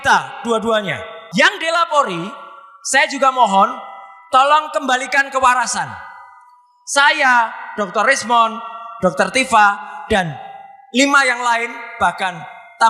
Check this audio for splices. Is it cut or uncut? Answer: cut